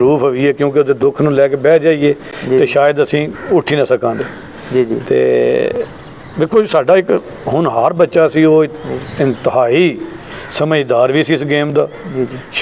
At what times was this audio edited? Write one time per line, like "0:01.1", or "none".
none